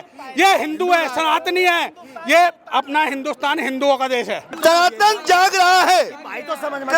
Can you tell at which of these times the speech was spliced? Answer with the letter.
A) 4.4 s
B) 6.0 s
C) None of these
A